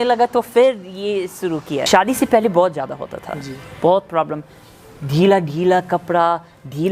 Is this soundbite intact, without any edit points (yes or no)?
no